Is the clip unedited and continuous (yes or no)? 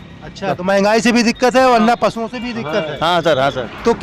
yes